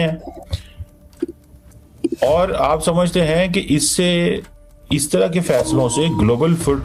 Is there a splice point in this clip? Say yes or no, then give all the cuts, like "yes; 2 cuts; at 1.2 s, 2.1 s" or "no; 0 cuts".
no; 0 cuts